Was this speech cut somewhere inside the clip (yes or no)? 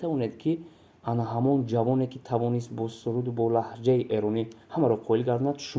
no